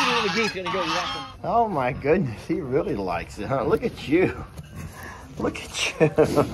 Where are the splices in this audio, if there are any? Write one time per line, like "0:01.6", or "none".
0:01.0